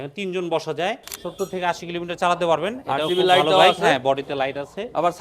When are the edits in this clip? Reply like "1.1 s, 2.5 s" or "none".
1.1 s